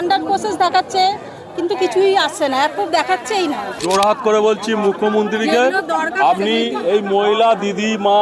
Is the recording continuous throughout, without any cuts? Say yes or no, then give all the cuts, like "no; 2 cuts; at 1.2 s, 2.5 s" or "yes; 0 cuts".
no; 1 cut; at 3.7 s